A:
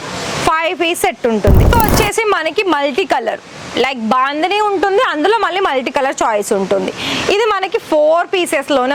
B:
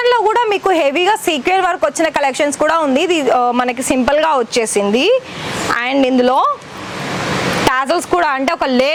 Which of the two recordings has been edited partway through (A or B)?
A